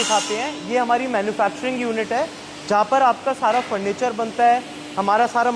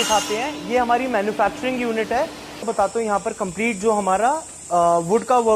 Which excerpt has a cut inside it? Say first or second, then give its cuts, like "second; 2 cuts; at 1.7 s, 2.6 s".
second; 1 cut; at 2.6 s